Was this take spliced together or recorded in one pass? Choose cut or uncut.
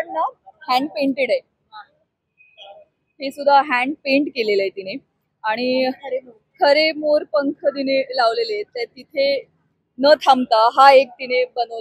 uncut